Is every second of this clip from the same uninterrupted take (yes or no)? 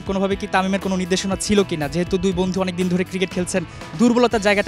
yes